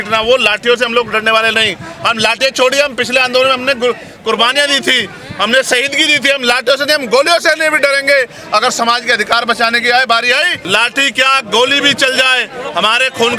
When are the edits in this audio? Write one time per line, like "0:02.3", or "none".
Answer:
0:10.6